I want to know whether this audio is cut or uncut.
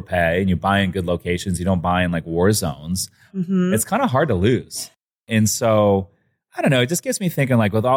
cut